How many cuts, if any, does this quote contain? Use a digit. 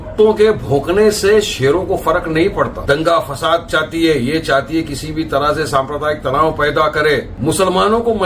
2